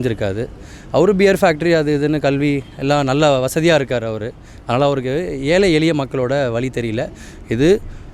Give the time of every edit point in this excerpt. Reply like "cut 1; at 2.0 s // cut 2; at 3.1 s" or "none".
none